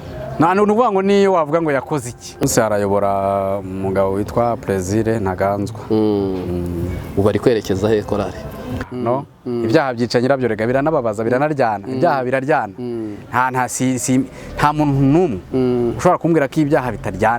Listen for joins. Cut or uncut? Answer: cut